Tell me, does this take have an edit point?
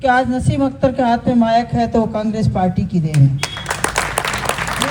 no; 0 cuts

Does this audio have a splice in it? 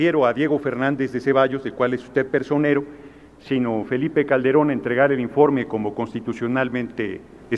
yes; 1 cut; at 3.9 s

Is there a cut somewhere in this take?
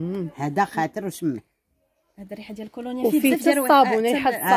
no; 0 cuts

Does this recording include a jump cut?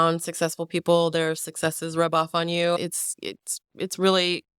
no; 0 cuts

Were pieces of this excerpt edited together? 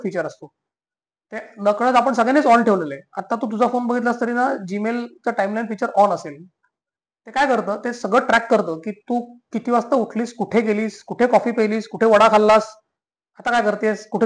no; 0 cuts

